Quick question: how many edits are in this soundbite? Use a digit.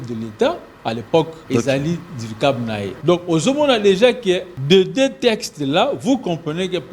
3